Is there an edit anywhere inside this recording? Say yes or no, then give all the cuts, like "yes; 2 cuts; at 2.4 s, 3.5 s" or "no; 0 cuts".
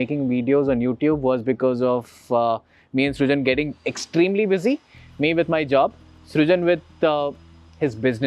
no; 0 cuts